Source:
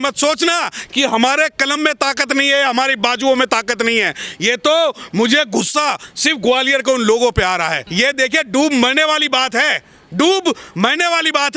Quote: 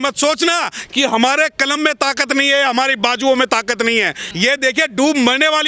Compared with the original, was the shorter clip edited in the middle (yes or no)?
yes